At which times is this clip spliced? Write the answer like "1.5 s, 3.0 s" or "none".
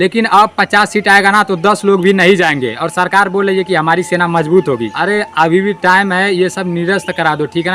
4.9 s